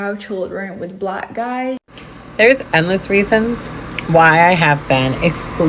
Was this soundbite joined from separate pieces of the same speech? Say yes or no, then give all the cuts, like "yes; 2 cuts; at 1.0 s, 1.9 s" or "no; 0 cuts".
yes; 1 cut; at 1.9 s